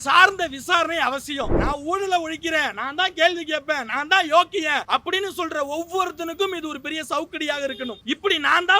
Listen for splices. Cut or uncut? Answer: cut